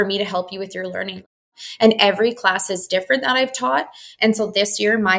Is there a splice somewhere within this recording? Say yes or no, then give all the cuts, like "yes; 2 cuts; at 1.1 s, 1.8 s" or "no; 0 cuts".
yes; 1 cut; at 1.4 s